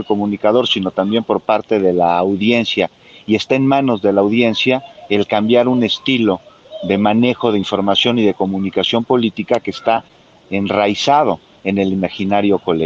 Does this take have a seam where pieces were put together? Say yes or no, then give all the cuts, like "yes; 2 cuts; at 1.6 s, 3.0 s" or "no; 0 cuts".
no; 0 cuts